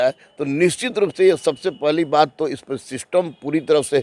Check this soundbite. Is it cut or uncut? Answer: uncut